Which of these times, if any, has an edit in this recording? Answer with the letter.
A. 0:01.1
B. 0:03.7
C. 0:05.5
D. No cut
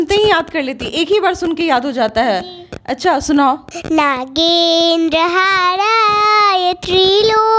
B